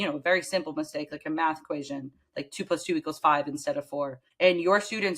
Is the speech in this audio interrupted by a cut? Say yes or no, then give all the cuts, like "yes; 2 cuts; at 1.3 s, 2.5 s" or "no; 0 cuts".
yes; 1 cut; at 4.2 s